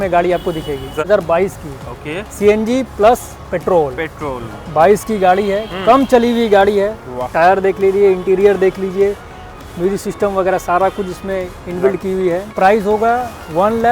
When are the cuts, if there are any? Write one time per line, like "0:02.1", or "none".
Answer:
0:01.0
0:12.5